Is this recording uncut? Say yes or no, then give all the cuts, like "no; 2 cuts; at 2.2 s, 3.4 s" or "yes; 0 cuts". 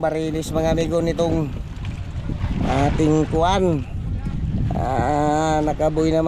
yes; 0 cuts